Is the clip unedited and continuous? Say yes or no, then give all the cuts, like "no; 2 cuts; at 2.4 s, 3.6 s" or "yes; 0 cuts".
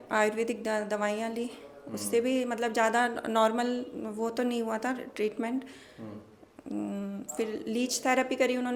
yes; 0 cuts